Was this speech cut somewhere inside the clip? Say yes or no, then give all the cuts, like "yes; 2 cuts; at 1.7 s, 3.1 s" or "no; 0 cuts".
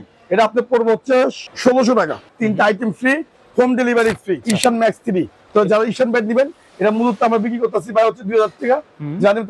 yes; 4 cuts; at 1.5 s, 2.2 s, 4.4 s, 5.4 s